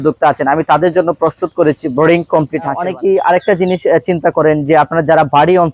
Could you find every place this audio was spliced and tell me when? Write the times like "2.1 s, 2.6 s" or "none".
2.8 s